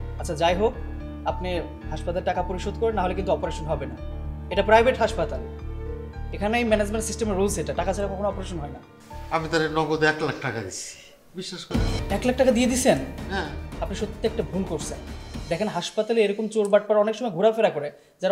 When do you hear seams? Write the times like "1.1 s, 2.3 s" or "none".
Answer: 12.0 s